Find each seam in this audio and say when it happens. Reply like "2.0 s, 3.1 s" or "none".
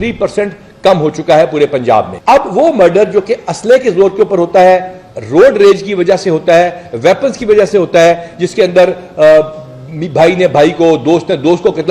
2.1 s